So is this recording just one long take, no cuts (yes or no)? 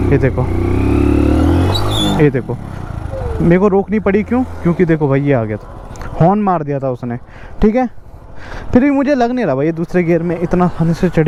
yes